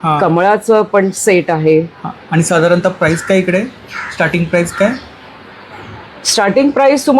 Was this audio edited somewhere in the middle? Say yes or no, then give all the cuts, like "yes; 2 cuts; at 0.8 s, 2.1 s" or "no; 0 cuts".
no; 0 cuts